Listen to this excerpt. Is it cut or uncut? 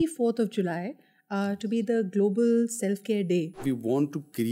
cut